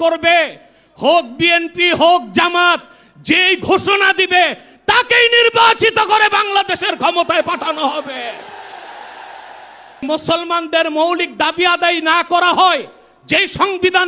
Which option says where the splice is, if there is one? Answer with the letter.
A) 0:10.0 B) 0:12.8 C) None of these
A